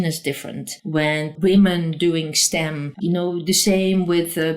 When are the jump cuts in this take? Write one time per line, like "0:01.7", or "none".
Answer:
0:01.2
0:02.8